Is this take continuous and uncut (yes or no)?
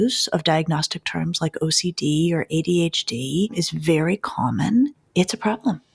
no